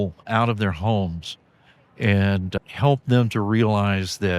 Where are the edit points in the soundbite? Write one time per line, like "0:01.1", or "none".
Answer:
0:02.6